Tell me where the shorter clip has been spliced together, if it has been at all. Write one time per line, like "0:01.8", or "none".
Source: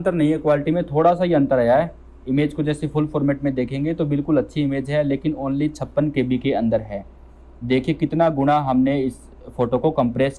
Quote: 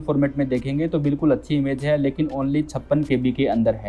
none